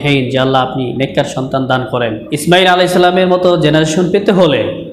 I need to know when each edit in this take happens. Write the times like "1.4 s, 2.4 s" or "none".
2.3 s